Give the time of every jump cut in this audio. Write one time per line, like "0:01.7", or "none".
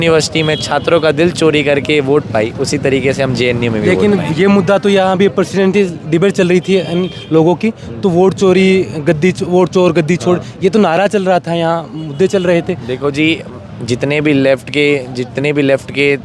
none